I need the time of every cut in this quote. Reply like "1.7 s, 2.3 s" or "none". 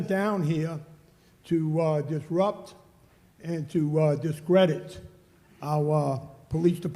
none